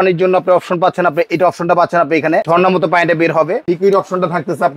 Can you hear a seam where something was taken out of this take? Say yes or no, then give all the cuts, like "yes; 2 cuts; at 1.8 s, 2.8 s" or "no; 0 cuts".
yes; 2 cuts; at 2.5 s, 3.6 s